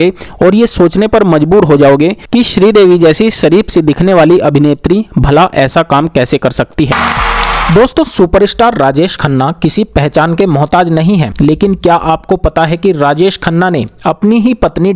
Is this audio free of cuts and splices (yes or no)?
no